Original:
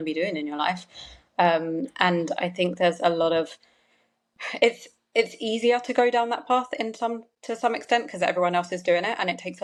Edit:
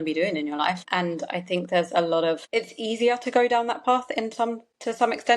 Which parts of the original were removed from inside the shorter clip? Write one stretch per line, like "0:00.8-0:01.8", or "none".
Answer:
0:00.8-0:01.9
0:03.5-0:05.1